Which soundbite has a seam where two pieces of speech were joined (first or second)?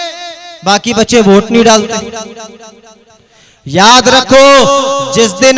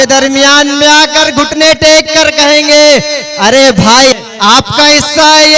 second